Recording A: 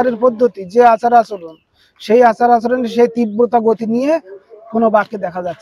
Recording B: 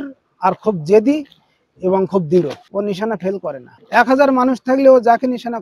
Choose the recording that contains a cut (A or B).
B